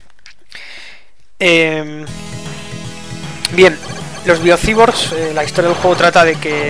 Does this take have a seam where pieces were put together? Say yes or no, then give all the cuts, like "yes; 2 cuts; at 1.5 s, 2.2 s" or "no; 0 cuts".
yes; 1 cut; at 3.4 s